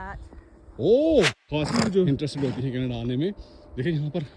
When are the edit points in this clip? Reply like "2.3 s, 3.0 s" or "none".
1.4 s, 2.1 s